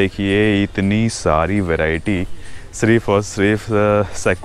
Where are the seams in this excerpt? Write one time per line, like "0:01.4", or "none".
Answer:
none